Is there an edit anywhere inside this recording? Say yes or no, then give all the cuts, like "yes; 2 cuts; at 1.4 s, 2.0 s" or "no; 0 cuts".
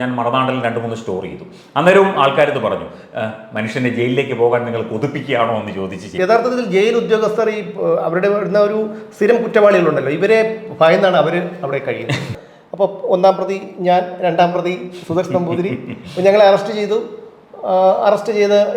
yes; 2 cuts; at 6.1 s, 12.3 s